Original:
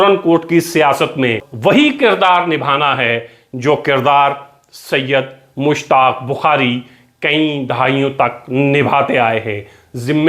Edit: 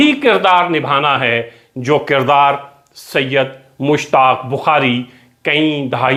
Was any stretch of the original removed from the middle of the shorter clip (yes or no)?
no